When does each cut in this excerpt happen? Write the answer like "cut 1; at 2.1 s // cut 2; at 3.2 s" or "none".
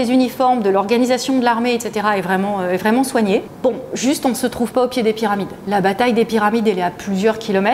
cut 1; at 3.5 s